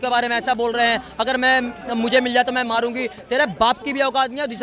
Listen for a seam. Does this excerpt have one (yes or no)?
no